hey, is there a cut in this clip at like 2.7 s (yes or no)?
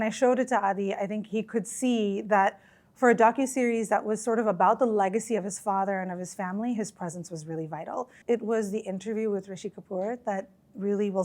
no